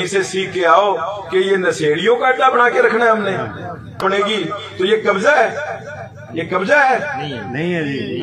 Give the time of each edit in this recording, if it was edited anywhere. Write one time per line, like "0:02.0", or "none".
0:04.1

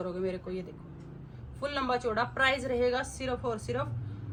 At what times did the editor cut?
none

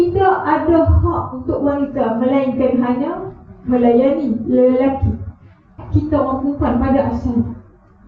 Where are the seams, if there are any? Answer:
0:05.8

